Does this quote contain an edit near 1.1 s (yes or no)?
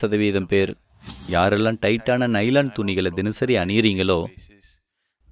yes